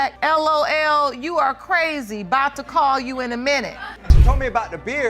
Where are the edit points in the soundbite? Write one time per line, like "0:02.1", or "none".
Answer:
0:04.0